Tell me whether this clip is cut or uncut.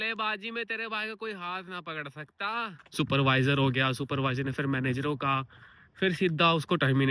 cut